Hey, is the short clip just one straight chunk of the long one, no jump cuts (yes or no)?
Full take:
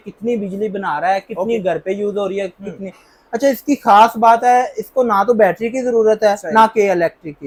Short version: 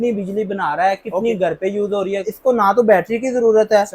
no